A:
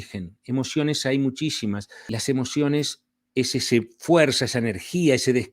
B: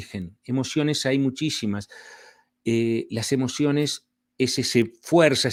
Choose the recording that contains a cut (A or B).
A